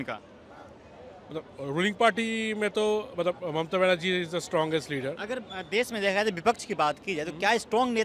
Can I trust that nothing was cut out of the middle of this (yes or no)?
yes